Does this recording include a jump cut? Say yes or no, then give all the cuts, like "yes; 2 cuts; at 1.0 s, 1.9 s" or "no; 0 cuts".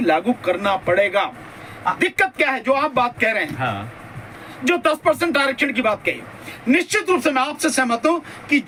no; 0 cuts